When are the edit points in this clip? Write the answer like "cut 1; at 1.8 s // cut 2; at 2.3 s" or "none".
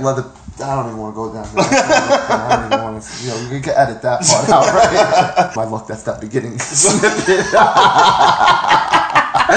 cut 1; at 5.5 s